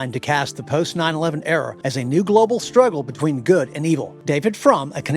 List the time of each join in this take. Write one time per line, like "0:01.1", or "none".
0:01.7
0:04.1